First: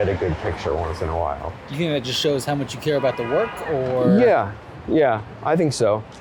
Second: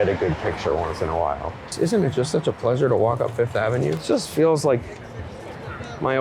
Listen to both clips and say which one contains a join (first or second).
second